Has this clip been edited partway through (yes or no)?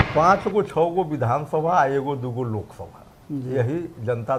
no